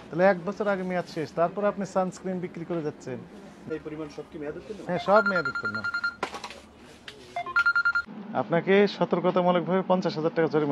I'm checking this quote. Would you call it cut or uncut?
cut